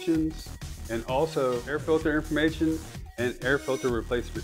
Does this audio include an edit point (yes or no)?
yes